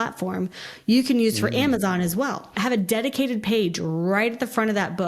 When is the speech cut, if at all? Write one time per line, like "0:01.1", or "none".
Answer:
0:02.5